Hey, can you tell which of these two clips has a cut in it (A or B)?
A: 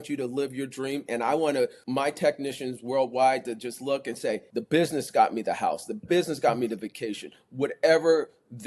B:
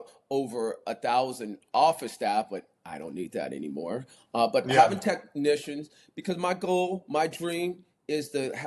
A